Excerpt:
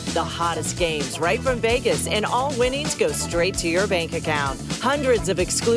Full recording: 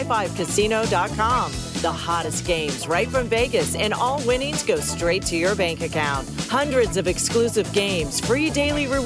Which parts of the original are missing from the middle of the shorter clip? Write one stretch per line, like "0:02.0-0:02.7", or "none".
none